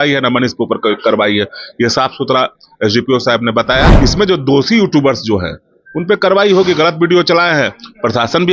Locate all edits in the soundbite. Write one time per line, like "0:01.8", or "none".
0:03.9